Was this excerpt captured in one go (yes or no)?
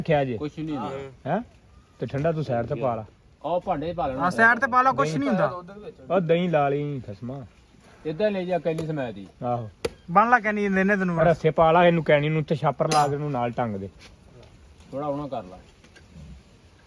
yes